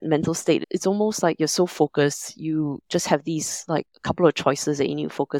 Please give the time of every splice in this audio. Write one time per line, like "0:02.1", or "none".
0:03.9